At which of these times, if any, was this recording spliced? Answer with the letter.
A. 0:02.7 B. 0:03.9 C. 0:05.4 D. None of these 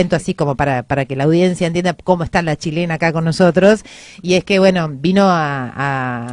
A